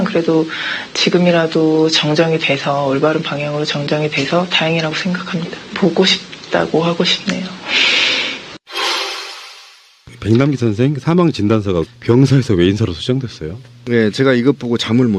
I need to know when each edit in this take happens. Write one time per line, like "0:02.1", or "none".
0:10.6